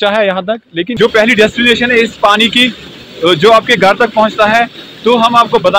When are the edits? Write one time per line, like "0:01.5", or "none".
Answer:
0:00.9